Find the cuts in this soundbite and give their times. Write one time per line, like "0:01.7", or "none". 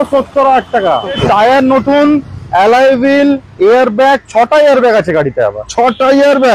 0:01.2